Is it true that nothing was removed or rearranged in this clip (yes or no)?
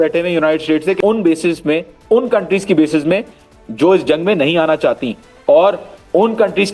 no